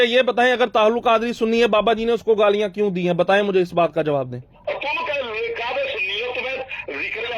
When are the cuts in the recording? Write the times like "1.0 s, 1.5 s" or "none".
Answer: 4.5 s